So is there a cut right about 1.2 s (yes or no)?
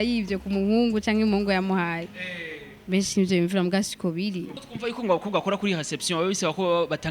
no